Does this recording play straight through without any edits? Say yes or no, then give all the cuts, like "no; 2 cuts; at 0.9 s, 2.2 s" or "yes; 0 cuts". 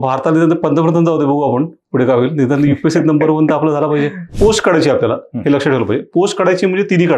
no; 1 cut; at 4.2 s